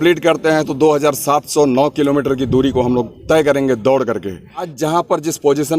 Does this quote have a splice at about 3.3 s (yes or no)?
no